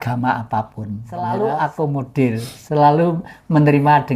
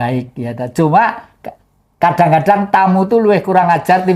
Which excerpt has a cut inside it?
first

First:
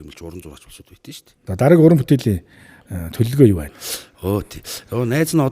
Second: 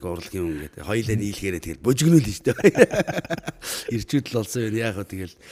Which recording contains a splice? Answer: first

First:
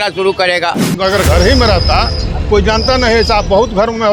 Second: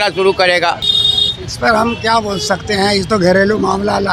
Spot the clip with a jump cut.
first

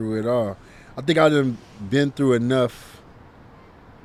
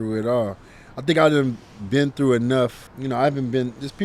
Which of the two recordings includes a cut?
second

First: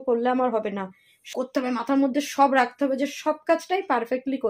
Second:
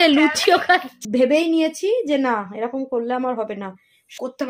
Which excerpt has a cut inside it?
second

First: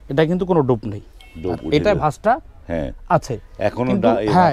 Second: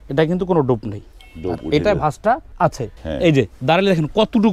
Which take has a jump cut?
second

